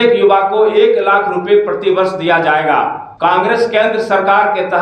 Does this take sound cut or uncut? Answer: cut